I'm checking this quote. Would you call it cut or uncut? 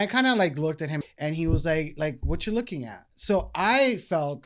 cut